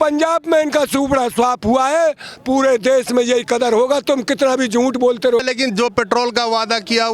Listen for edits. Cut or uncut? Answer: uncut